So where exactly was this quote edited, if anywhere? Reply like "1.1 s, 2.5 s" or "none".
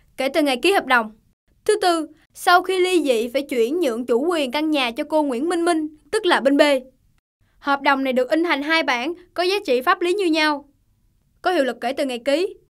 none